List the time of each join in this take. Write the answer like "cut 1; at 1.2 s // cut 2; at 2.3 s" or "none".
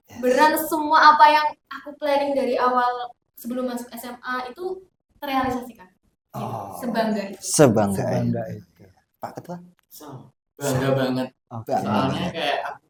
none